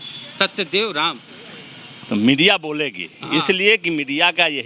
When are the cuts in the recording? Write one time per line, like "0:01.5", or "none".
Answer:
none